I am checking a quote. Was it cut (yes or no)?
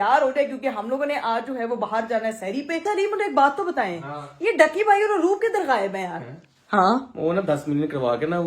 yes